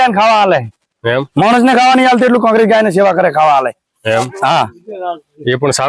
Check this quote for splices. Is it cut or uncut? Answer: uncut